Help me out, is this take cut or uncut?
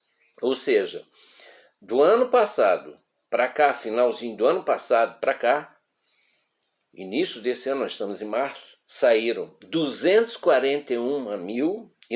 uncut